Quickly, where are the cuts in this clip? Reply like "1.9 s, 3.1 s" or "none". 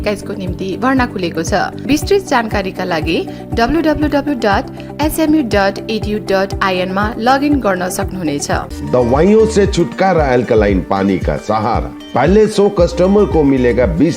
1.8 s, 8.7 s